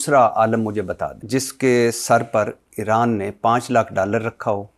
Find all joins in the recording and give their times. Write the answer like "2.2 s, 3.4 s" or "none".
1.1 s